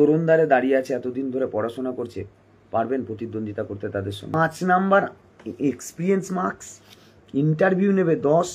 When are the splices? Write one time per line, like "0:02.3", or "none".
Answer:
0:04.3